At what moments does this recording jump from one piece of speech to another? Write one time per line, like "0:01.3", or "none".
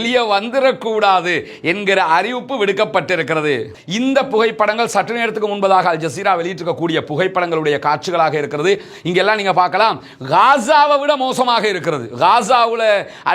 0:03.8